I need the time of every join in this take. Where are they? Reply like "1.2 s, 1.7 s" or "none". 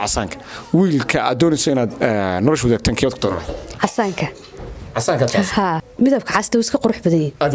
3.7 s, 5.8 s